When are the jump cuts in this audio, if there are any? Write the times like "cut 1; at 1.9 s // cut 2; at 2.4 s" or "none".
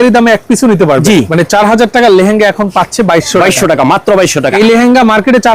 cut 1; at 1.3 s // cut 2; at 4.5 s